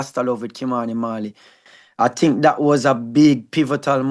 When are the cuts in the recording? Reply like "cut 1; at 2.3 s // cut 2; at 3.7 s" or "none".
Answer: none